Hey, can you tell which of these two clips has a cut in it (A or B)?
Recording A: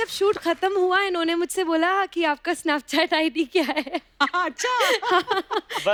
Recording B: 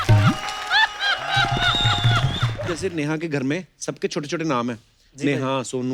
B